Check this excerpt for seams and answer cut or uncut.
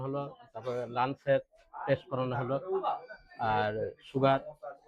uncut